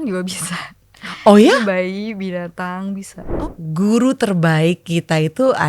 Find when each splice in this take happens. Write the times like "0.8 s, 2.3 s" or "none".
3.3 s